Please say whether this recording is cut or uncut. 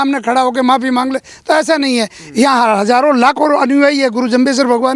uncut